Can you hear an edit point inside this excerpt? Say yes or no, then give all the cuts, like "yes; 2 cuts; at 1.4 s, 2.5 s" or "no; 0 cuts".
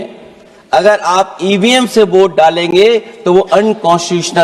no; 0 cuts